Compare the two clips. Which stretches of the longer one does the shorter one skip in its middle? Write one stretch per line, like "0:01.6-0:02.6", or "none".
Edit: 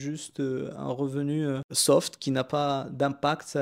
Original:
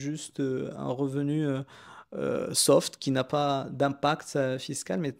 0:01.7-0:02.5